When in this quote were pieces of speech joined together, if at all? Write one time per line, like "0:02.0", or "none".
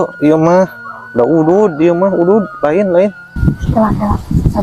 0:03.3